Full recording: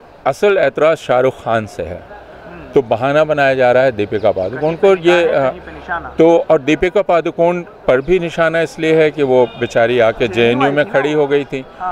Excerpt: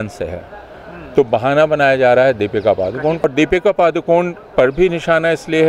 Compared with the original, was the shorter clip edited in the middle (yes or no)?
yes